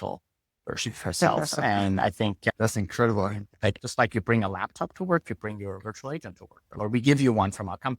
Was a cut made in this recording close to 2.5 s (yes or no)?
yes